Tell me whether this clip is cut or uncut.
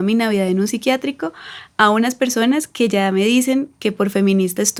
uncut